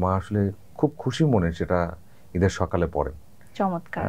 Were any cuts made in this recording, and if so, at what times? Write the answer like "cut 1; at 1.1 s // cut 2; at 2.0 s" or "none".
none